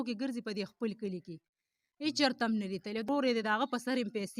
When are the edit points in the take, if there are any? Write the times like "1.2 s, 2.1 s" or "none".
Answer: 3.1 s